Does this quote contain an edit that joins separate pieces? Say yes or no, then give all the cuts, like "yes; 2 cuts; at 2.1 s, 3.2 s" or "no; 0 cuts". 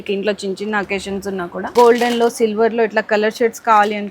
yes; 1 cut; at 1.7 s